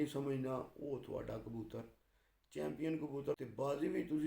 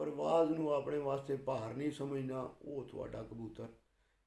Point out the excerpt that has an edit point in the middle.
first; 1 cut; at 3.3 s

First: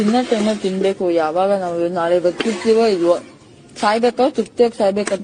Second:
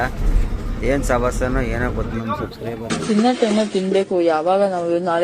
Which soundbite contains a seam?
second; 1 cut; at 2.1 s

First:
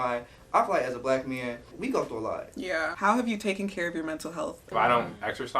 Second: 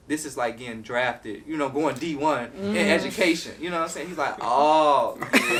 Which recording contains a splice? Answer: first; 3 cuts; at 1.8 s, 2.9 s, 4.7 s

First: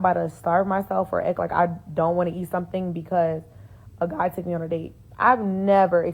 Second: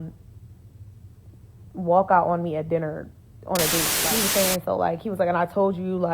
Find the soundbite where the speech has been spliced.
second; 1 cut; at 3.9 s

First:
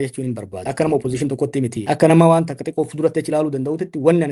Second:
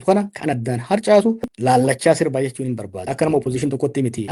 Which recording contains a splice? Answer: second; 1 cut; at 1.4 s

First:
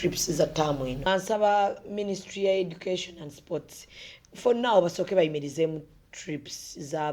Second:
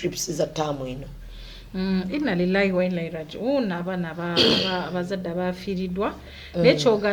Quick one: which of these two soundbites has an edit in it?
first; 1 cut; at 1.1 s

